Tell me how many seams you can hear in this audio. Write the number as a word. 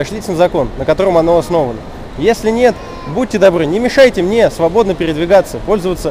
zero